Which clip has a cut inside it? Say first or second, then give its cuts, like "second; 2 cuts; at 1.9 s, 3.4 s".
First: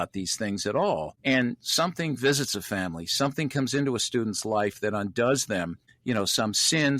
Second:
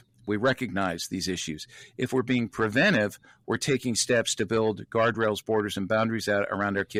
first; 2 cuts; at 1.1 s, 5.8 s